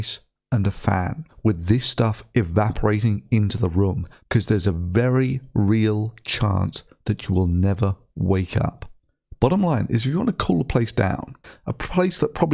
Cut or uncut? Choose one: cut